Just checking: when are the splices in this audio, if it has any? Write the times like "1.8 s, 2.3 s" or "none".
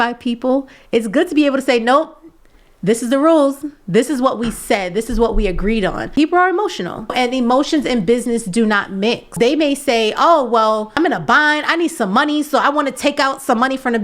6.1 s, 7.1 s, 9.3 s, 10.9 s